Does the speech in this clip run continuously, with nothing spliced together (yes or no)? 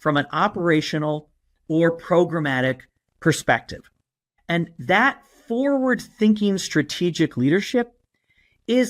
no